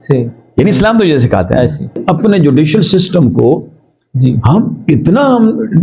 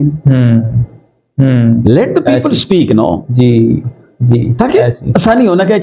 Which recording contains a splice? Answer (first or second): first